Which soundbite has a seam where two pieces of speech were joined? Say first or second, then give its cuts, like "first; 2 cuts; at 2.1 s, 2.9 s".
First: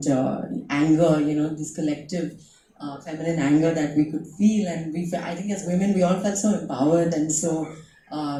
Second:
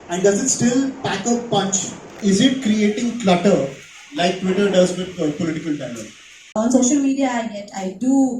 second; 2 cuts; at 2.1 s, 6.5 s